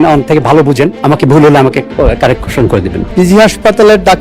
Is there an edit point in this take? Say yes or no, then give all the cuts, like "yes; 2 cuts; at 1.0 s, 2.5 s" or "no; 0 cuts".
yes; 2 cuts; at 1.0 s, 3.0 s